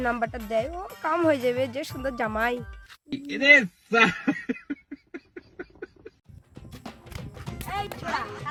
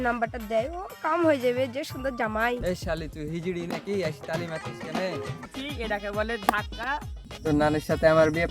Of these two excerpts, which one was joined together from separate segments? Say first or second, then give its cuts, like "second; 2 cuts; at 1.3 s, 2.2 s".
second; 2 cuts; at 2.6 s, 5.4 s